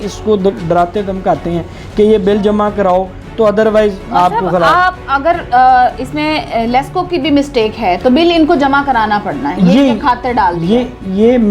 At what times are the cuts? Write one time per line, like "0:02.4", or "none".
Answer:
none